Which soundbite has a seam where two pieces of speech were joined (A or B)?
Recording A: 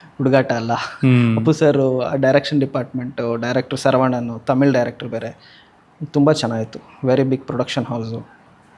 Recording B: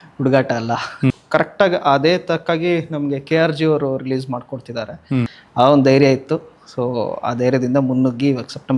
B